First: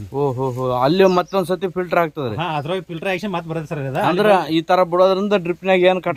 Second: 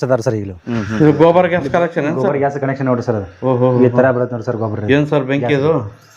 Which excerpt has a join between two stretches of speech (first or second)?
second